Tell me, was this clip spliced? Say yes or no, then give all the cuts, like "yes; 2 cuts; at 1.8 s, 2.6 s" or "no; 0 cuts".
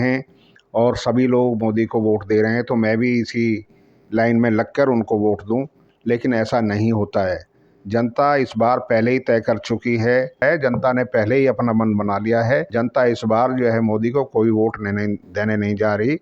yes; 2 cuts; at 10.4 s, 12.7 s